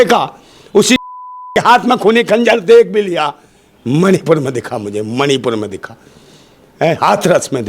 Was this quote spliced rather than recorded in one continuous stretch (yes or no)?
no